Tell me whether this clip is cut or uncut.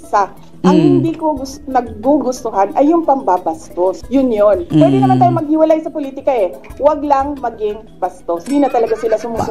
cut